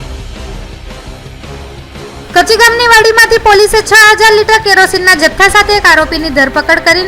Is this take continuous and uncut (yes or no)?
no